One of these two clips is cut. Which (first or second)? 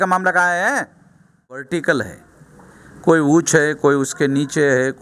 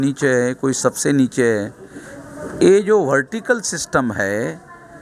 first